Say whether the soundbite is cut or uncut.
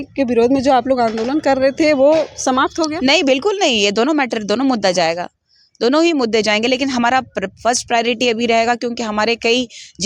uncut